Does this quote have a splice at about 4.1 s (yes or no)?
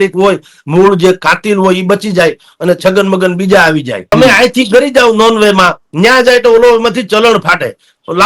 yes